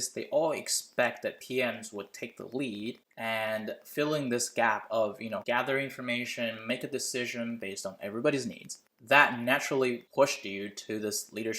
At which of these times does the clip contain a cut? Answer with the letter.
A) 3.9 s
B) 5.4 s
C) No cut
B